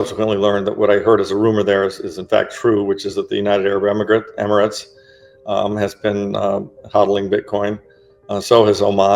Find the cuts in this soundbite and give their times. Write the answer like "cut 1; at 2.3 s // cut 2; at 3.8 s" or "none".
none